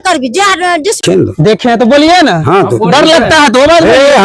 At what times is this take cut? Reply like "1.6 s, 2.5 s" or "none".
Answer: 1.0 s